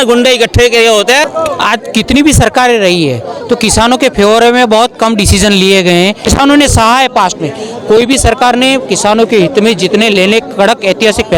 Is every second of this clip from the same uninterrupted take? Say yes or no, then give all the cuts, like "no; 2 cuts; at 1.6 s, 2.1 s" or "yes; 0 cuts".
no; 2 cuts; at 1.3 s, 6.2 s